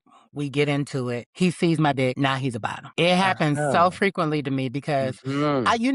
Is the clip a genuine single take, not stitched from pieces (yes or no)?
no